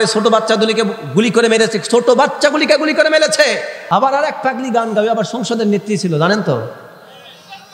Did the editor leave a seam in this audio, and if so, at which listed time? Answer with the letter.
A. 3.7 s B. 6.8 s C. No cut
A